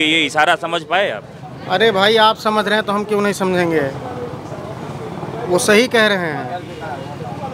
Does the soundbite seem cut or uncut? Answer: uncut